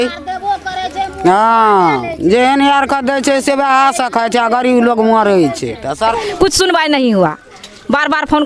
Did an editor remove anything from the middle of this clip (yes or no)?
yes